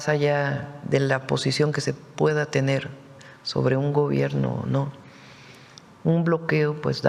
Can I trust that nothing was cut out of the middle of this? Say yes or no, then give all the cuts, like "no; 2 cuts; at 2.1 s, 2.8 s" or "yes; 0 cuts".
yes; 0 cuts